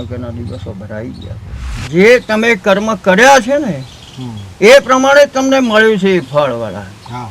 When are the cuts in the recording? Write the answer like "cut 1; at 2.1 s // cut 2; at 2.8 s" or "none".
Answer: cut 1; at 1.8 s